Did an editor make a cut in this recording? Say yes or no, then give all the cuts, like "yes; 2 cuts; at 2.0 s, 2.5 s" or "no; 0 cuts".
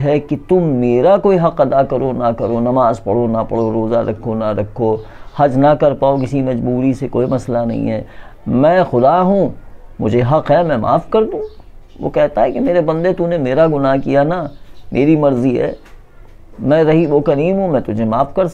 no; 0 cuts